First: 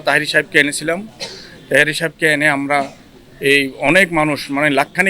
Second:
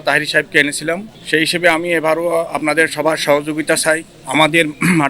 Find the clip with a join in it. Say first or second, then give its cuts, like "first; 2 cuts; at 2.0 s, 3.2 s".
second; 2 cuts; at 1.1 s, 4.1 s